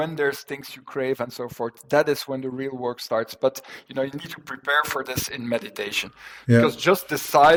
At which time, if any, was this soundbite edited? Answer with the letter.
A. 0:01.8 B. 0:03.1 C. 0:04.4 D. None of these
D